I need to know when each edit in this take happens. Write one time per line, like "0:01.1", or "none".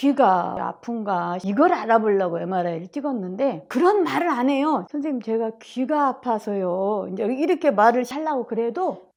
none